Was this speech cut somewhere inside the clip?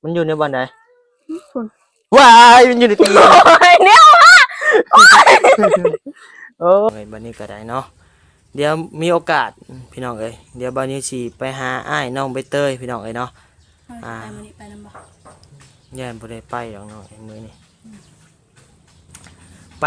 yes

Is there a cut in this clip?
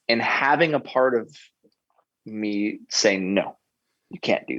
no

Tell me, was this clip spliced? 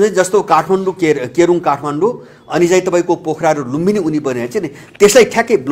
no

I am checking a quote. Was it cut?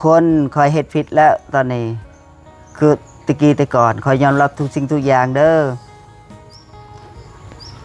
no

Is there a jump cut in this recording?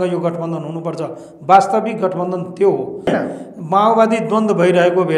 yes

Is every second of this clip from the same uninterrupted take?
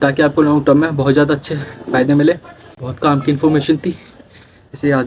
no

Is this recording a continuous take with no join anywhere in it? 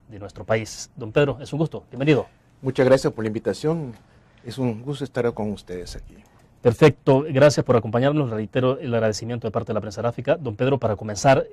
no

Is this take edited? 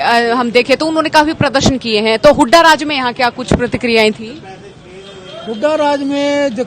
no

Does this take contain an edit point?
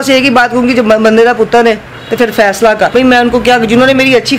yes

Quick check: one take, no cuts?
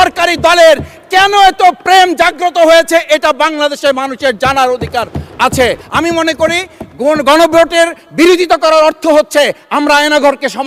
no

